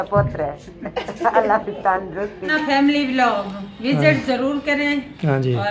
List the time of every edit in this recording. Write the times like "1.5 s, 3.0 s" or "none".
2.5 s